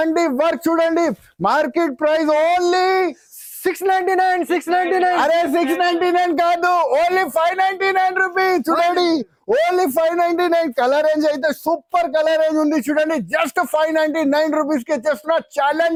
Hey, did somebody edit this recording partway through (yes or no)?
no